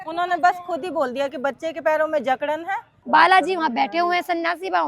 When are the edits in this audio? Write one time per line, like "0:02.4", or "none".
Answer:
0:02.9